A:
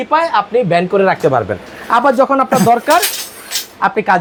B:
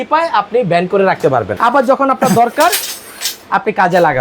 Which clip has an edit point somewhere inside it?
B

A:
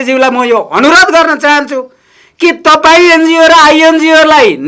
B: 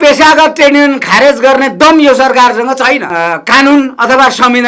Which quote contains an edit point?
B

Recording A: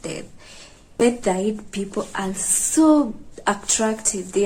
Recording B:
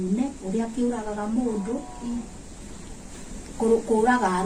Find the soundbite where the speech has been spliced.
A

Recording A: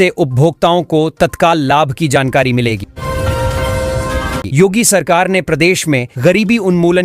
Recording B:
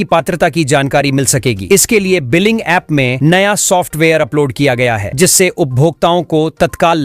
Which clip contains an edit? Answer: A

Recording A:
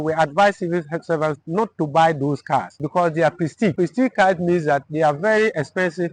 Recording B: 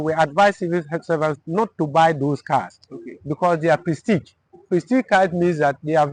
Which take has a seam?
A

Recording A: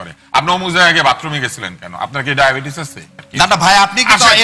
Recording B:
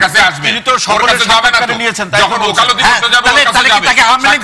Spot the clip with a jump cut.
A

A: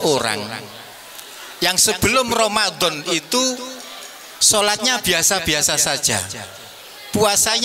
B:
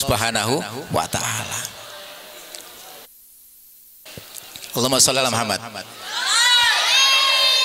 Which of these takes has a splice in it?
B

